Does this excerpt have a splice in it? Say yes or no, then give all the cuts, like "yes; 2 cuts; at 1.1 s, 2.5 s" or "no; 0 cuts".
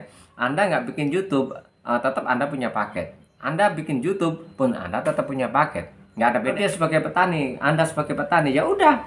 yes; 1 cut; at 6.5 s